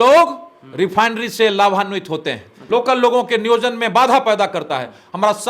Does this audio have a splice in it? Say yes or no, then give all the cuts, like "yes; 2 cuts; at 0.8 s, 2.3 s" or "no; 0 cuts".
yes; 1 cut; at 2.5 s